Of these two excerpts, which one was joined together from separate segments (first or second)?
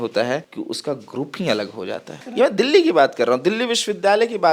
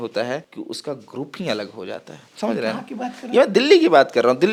first